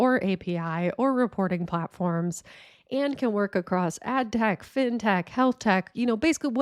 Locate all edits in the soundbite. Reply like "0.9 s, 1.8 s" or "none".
none